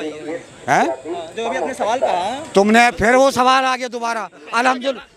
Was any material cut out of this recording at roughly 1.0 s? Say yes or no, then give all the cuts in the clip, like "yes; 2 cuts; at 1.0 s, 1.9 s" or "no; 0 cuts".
no; 0 cuts